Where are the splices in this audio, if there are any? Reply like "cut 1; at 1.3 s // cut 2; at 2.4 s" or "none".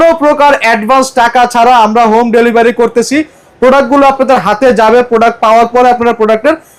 none